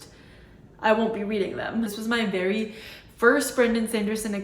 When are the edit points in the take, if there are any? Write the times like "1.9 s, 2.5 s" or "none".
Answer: 1.9 s